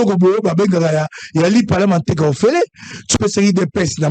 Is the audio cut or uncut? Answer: cut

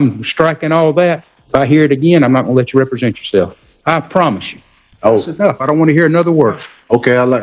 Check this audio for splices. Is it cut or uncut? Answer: cut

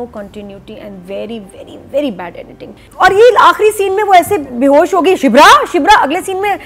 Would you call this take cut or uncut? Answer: cut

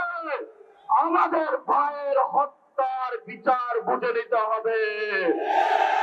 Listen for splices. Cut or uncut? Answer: uncut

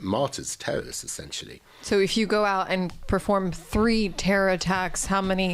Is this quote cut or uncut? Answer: uncut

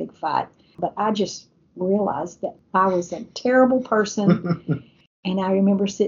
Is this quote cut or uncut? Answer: cut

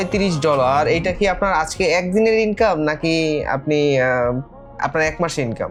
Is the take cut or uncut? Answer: uncut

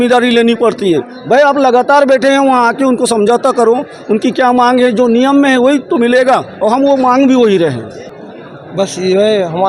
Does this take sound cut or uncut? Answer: uncut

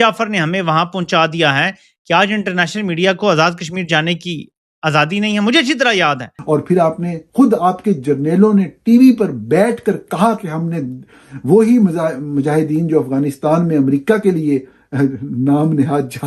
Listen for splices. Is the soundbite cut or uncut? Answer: cut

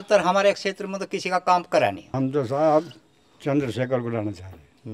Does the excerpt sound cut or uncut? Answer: cut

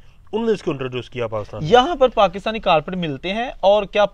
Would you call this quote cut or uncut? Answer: cut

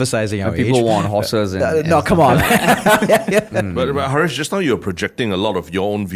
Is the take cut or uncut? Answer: cut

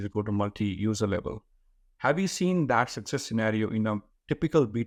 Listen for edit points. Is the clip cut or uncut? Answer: uncut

